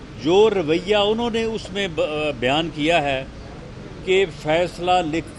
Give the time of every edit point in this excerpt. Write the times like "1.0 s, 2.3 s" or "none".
none

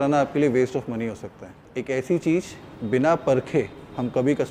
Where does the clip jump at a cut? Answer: 1.7 s

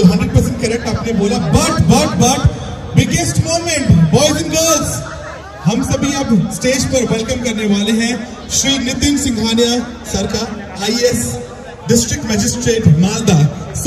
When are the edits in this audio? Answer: none

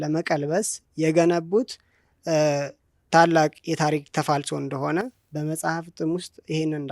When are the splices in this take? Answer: none

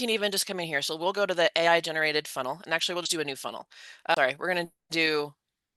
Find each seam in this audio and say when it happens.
none

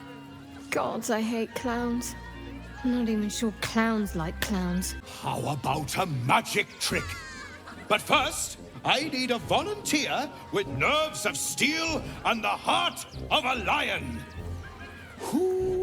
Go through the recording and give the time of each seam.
5.0 s

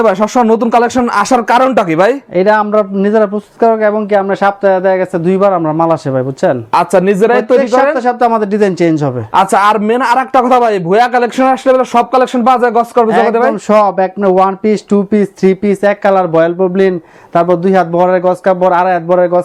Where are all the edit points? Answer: none

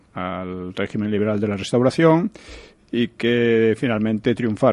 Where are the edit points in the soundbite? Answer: 1.6 s

